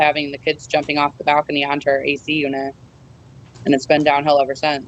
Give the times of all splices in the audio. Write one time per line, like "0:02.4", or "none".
none